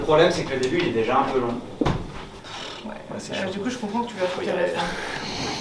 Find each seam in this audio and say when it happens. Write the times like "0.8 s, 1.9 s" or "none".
2.5 s